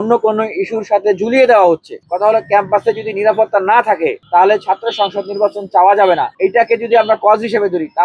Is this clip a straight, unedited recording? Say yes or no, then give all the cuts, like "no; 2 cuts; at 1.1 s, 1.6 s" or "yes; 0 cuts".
no; 1 cut; at 1.9 s